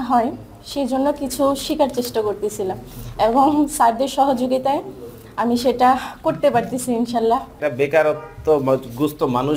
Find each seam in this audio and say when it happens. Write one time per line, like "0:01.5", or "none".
0:07.5